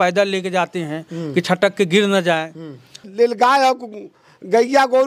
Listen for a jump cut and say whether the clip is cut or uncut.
cut